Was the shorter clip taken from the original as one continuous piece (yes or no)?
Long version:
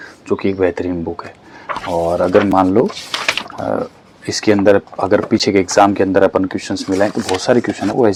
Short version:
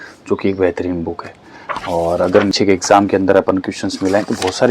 no